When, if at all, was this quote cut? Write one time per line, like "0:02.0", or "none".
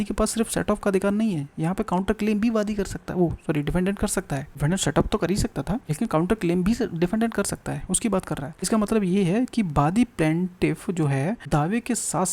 0:04.5
0:05.9
0:08.6
0:11.4